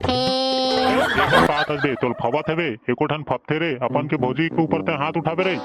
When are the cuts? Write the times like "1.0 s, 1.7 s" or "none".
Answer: 1.5 s